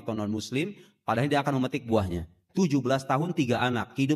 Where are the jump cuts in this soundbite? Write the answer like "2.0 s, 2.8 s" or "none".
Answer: 2.4 s